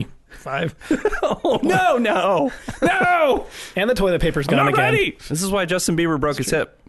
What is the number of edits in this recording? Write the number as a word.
one